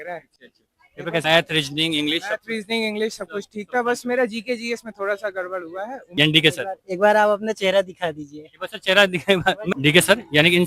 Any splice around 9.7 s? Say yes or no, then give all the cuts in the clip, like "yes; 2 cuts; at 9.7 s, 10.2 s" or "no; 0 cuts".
yes; 3 cuts; at 1.2 s, 6.1 s, 9.7 s